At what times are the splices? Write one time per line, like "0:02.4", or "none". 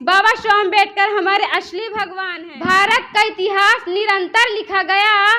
0:02.2